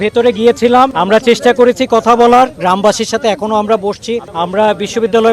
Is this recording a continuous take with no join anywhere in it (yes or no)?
no